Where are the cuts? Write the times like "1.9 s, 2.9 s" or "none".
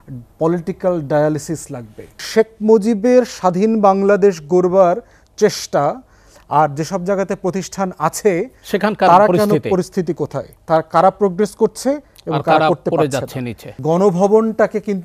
2.2 s, 13.8 s